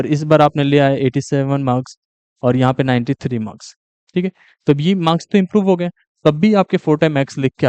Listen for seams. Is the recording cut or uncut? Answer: uncut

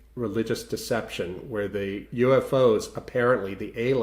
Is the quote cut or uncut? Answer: cut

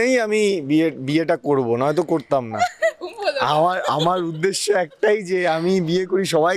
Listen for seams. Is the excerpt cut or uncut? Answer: uncut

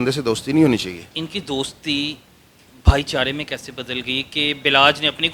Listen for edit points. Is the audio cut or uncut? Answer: cut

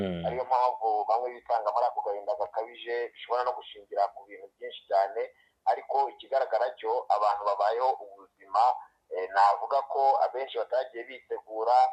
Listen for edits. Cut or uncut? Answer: uncut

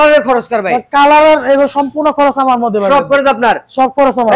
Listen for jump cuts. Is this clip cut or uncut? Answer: uncut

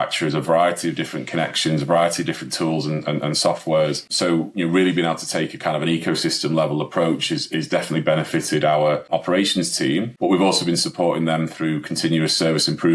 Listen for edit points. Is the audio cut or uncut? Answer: cut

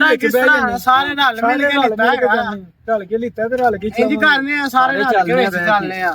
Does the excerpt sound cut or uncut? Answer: uncut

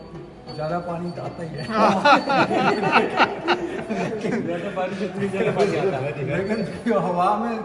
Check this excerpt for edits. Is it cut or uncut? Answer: uncut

